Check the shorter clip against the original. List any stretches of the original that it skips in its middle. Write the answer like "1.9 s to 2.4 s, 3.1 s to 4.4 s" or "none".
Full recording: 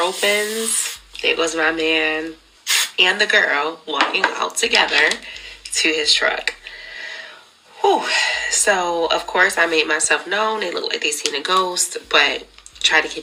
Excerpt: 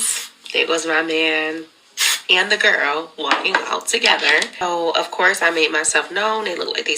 5.3 s to 8.8 s

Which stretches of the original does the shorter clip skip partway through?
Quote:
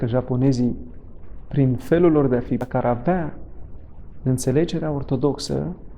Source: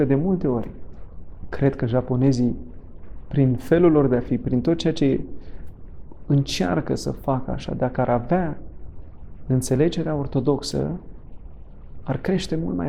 4.5 s to 7.9 s

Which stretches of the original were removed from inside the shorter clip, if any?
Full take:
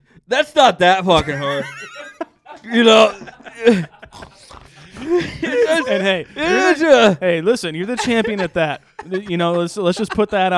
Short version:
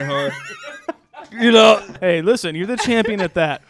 3.3 s to 7.2 s

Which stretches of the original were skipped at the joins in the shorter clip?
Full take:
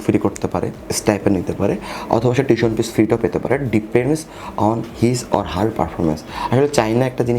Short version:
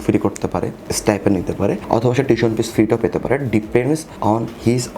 1.8 s to 2.0 s, 4.3 s to 4.5 s

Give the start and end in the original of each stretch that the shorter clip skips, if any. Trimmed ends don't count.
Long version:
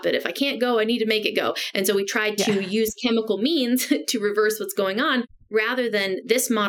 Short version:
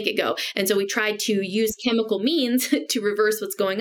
none

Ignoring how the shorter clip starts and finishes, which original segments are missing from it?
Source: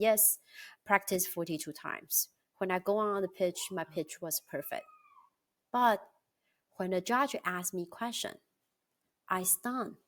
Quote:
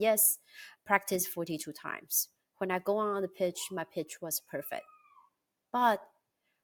none

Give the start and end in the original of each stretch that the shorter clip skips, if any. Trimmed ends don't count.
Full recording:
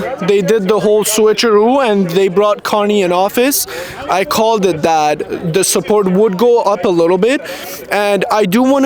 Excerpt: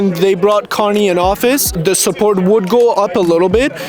3.6 s to 5.4 s

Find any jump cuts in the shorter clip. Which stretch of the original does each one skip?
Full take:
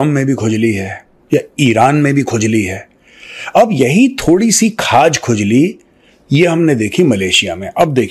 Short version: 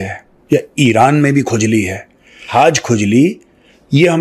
3.2 s to 4.8 s

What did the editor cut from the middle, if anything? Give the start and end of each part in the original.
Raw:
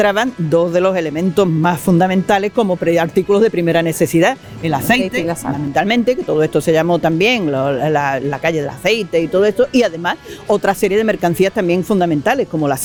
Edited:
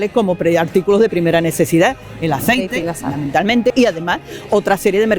6.1 s to 9.7 s

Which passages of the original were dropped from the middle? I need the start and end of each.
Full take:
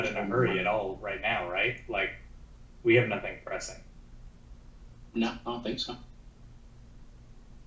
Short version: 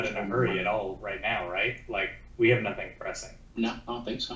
2.2 s to 2.7 s, 3.8 s to 4.9 s

